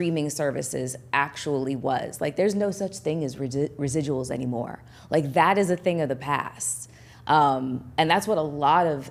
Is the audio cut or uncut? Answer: uncut